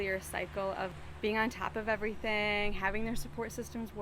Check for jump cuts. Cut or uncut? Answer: cut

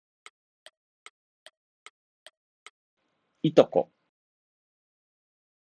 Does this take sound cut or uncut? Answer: uncut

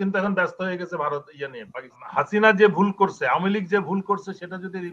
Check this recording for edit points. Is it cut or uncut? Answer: cut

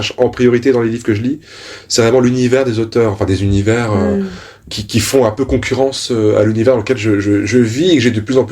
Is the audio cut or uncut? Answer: uncut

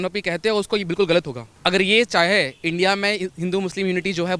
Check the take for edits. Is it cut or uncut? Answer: cut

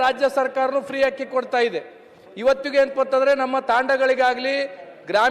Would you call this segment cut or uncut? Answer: uncut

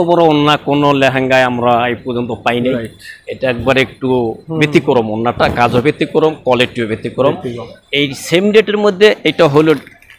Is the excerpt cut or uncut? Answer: uncut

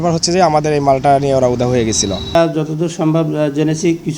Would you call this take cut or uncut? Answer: cut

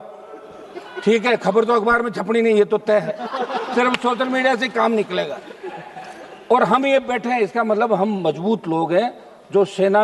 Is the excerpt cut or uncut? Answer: uncut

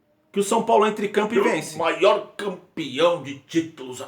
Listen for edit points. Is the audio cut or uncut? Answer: cut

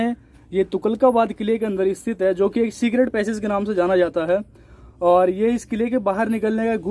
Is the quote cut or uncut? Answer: uncut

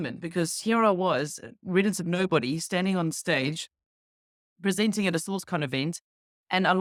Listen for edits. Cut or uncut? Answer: uncut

